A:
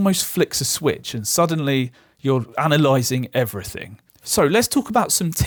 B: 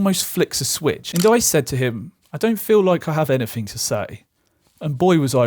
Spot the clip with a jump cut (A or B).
B